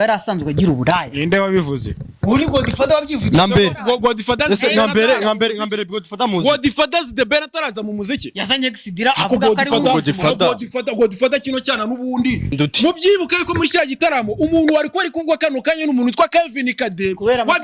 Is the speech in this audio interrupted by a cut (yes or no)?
yes